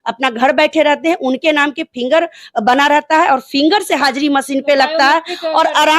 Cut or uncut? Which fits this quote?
uncut